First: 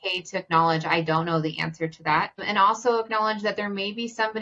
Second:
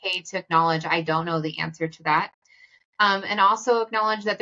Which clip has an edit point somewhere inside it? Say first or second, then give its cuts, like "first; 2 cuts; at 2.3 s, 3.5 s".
first; 1 cut; at 2.4 s